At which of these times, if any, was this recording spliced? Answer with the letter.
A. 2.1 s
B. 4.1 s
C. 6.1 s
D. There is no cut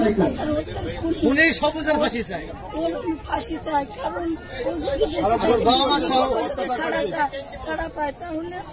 D